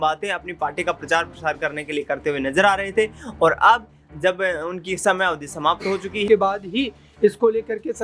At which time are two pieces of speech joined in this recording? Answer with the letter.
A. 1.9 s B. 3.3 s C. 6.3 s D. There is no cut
C